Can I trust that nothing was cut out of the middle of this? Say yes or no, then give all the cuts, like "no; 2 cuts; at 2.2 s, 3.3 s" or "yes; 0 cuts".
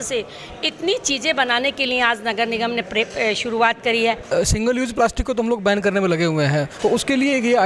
no; 2 cuts; at 4.3 s, 6.7 s